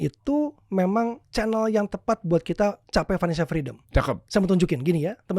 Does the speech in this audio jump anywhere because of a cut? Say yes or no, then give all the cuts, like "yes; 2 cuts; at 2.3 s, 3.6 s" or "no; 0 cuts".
yes; 3 cuts; at 1.2 s, 2.8 s, 3.8 s